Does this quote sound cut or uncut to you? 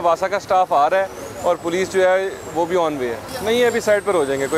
uncut